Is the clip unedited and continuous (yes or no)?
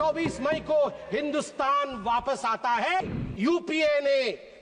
no